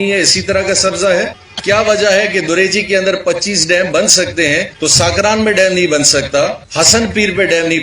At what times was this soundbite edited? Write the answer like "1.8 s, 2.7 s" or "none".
1.5 s, 4.7 s, 6.6 s